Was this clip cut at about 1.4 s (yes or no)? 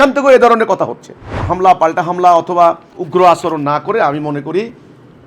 yes